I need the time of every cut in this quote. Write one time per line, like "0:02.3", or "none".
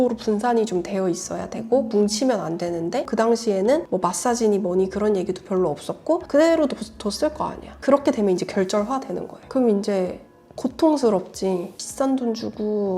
0:03.1
0:07.7
0:11.7